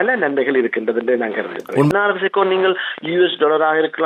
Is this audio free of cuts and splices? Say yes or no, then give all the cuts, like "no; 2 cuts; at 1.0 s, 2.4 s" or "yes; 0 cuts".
no; 1 cut; at 1.9 s